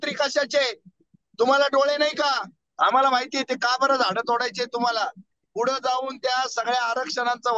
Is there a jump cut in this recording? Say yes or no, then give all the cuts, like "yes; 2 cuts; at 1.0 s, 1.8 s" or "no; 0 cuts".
yes; 1 cut; at 2.6 s